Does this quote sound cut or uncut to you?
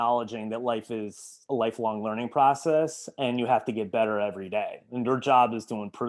uncut